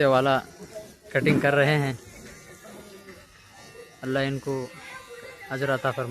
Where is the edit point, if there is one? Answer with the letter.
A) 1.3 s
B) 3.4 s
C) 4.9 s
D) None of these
D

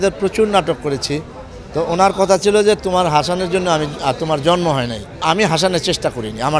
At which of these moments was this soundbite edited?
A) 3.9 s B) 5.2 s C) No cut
B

